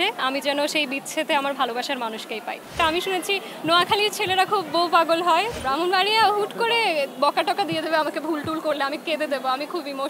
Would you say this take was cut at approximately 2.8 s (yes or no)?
yes